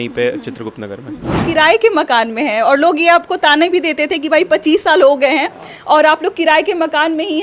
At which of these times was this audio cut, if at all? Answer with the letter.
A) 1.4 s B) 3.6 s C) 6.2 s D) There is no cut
A